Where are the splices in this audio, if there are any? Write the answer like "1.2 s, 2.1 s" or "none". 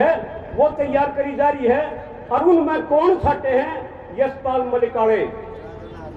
none

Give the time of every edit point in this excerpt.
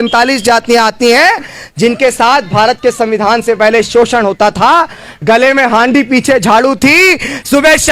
none

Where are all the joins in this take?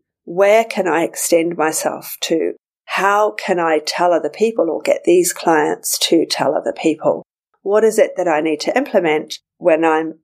none

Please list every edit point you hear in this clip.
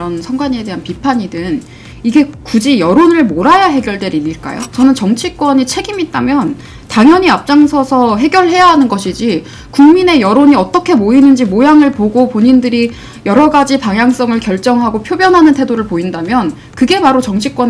none

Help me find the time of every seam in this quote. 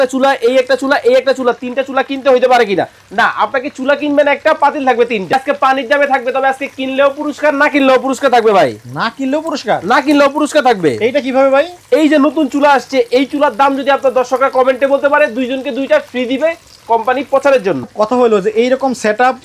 5.3 s, 17.8 s

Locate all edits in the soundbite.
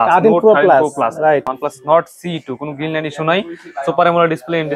1.5 s

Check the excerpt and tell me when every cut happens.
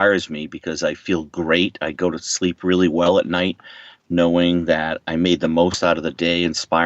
none

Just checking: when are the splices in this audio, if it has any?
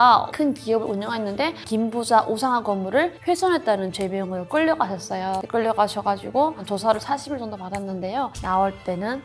1.6 s, 8.4 s

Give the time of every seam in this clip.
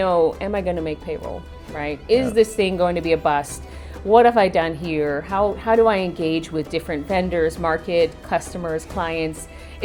none

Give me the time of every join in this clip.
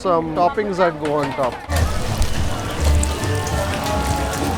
1.7 s

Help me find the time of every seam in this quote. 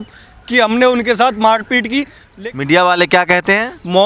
2.2 s

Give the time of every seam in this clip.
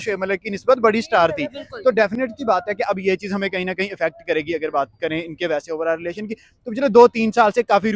none

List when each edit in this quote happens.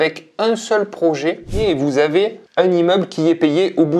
1.6 s

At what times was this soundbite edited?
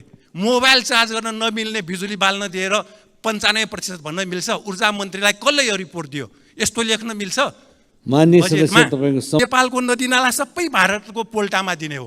9.4 s

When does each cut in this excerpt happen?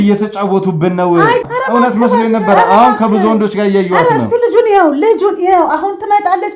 1.5 s

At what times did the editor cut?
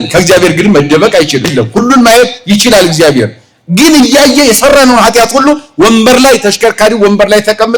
1.5 s

